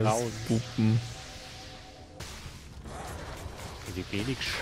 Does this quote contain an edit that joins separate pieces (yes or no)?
yes